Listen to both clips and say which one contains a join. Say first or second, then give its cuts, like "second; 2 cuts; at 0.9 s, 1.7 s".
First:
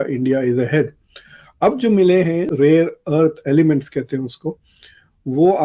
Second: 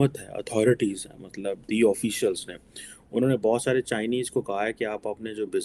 first; 1 cut; at 2.5 s